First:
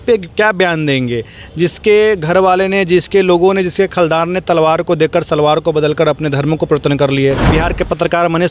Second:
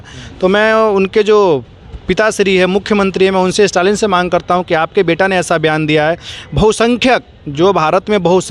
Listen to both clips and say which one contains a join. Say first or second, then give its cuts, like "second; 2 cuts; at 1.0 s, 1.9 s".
first; 1 cut; at 7.4 s